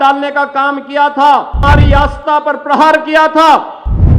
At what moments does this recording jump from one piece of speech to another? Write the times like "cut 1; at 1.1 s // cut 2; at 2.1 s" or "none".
cut 1; at 1.6 s